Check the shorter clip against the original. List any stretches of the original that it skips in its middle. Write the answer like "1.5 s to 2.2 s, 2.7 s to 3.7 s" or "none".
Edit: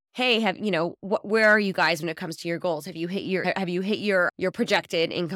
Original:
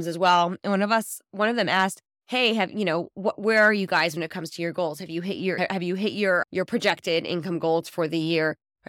none

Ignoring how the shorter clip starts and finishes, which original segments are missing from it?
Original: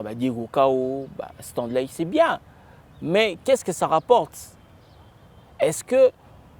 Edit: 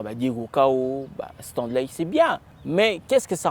2.5 s to 2.9 s

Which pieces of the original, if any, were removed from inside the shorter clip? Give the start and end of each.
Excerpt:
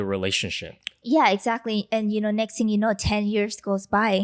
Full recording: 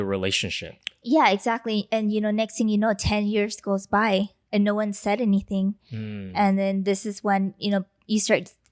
none

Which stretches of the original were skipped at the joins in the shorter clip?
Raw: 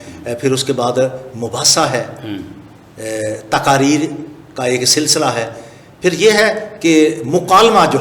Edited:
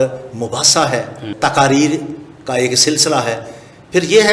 2.3 s to 3.4 s

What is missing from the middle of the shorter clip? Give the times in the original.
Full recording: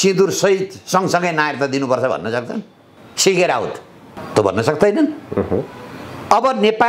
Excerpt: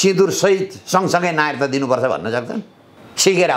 none

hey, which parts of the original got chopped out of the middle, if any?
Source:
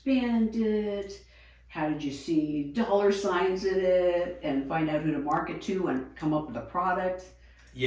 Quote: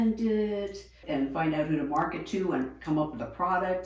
1.4 s to 4.4 s

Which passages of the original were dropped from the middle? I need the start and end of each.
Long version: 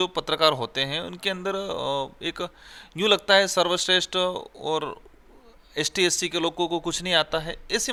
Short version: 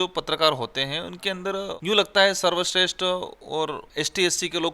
1.7 s to 2.9 s, 5.0 s to 5.6 s

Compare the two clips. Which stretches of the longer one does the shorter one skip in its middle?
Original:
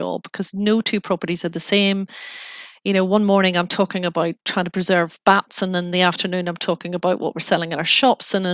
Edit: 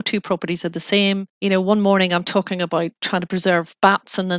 2.1 s to 2.7 s

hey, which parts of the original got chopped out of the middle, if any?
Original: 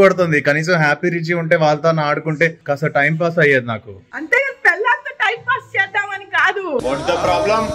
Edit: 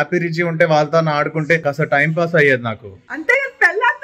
2.5 s to 2.6 s

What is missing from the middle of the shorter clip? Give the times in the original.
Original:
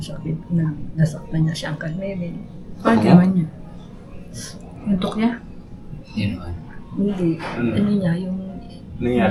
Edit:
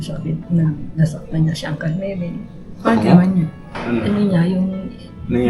3.8 s to 7.5 s

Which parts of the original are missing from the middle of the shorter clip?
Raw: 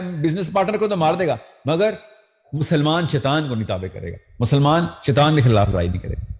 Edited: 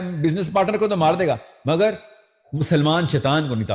none

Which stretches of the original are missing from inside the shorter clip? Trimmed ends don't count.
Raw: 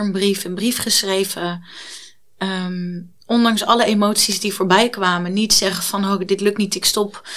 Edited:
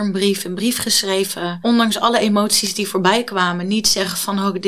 1.6 s to 3.2 s

